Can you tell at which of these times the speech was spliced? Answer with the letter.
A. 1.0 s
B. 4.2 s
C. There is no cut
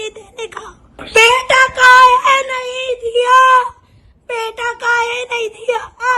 A